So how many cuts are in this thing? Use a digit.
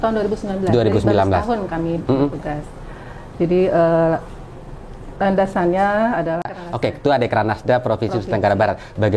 1